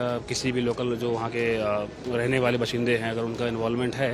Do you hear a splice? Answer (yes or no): no